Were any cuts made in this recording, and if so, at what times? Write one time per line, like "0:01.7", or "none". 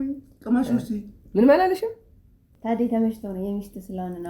0:02.5